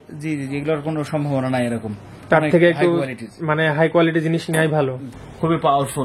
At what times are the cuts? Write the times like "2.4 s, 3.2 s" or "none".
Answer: 5.1 s